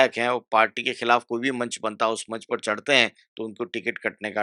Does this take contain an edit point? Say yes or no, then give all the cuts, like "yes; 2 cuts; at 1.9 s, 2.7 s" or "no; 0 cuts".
no; 0 cuts